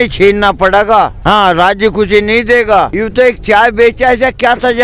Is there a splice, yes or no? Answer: yes